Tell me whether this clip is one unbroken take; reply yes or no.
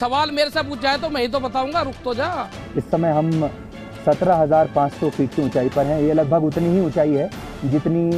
no